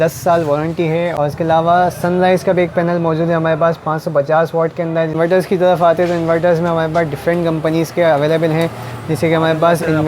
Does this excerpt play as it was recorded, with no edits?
no; 2 cuts; at 1.1 s, 5.1 s

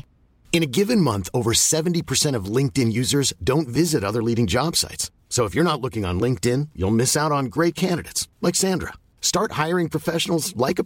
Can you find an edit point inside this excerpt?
no; 0 cuts

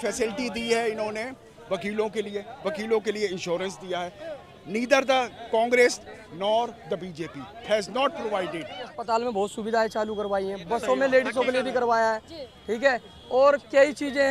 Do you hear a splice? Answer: yes; 1 cut; at 9.0 s

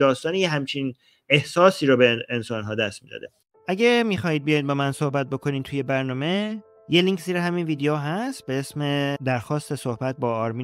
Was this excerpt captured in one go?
no; 1 cut; at 3.6 s

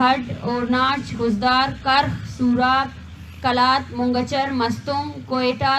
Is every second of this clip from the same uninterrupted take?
yes; 0 cuts

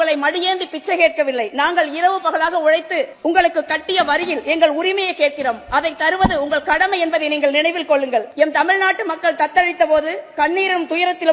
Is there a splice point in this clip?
yes; 2 cuts; at 3.1 s, 8.3 s

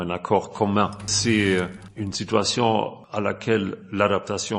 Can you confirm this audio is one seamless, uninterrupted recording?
no; 3 cuts; at 1.1 s, 1.8 s, 3.0 s

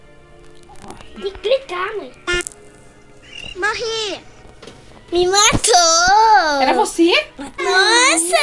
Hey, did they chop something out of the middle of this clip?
yes; 1 cut; at 7.5 s

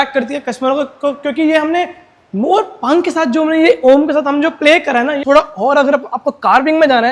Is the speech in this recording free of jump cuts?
no; 1 cut; at 5.2 s

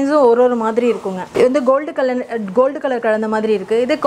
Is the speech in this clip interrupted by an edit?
no; 0 cuts

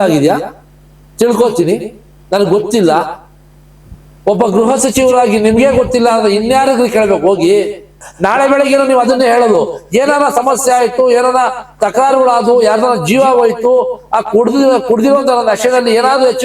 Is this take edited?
yes; 1 cut; at 8.1 s

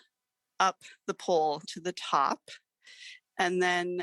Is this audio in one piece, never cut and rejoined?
no; 1 cut; at 1.7 s

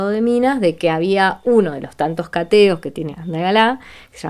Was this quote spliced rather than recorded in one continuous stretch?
yes; 2 cuts; at 1.4 s, 3.1 s

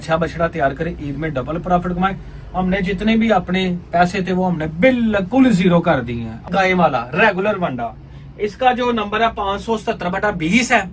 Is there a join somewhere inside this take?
yes; 1 cut; at 6.4 s

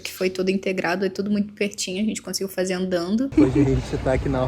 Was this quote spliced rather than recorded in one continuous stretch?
yes; 1 cut; at 3.3 s

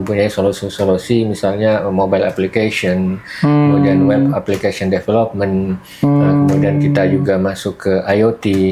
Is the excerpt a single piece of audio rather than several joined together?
yes; 0 cuts

